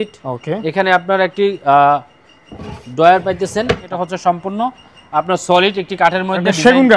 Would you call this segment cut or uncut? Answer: cut